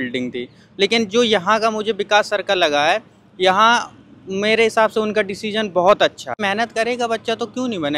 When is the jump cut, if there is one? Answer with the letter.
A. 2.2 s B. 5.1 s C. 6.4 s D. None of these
C